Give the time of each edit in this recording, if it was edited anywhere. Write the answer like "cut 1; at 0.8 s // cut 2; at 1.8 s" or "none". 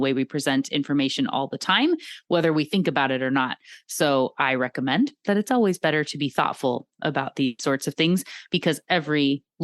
none